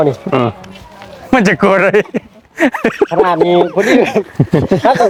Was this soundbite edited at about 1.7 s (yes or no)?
no